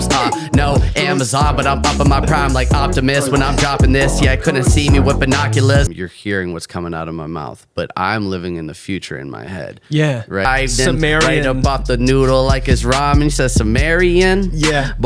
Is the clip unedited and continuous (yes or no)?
no